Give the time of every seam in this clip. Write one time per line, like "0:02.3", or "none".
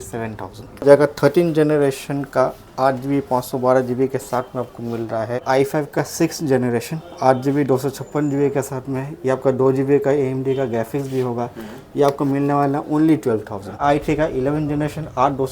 0:00.8
0:05.4
0:13.8